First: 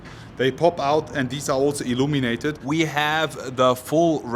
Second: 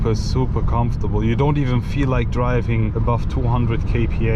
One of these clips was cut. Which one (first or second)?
first